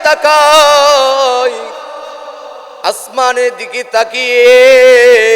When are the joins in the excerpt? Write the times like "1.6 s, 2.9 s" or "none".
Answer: none